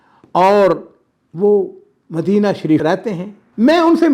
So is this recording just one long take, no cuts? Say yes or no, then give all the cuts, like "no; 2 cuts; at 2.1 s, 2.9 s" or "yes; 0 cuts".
no; 1 cut; at 2.8 s